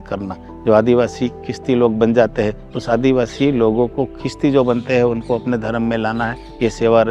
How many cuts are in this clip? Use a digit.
0